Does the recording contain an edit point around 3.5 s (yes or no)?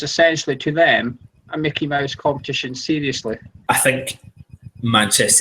yes